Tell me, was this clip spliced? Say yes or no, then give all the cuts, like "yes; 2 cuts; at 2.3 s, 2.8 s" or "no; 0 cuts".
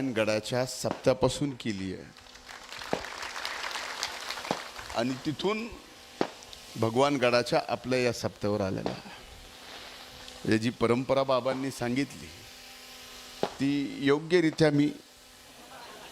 no; 0 cuts